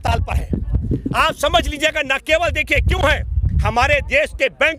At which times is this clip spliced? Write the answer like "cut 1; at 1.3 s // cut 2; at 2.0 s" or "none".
none